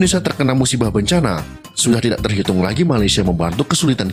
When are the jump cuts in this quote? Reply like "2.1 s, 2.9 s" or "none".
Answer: none